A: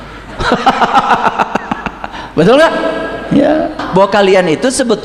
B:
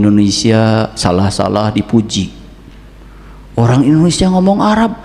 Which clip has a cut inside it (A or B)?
A